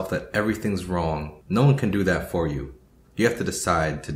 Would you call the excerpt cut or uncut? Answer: cut